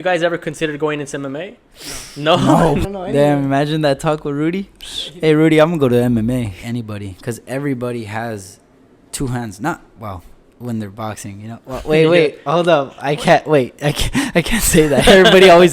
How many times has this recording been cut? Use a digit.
2